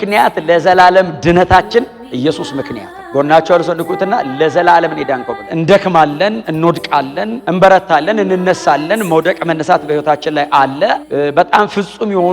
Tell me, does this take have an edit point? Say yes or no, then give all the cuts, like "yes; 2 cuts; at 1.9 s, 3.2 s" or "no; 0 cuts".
yes; 1 cut; at 5.5 s